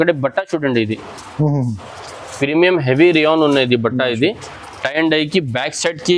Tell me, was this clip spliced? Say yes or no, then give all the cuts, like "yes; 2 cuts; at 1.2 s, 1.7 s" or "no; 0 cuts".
no; 0 cuts